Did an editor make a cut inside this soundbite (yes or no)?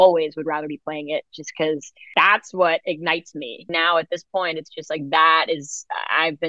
yes